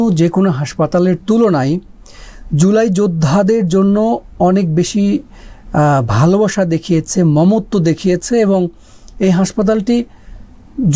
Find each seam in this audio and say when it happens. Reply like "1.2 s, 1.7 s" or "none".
none